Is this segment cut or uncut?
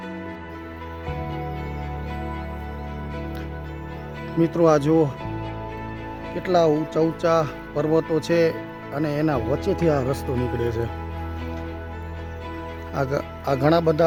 uncut